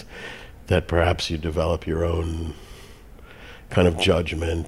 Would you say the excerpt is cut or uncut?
uncut